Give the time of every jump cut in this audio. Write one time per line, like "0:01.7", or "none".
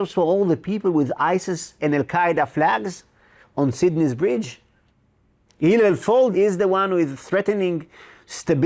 0:06.3